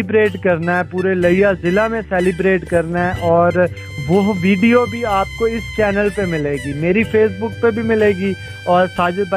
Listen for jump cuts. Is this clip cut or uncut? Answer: uncut